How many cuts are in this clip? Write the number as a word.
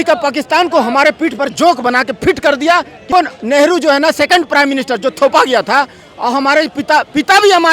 one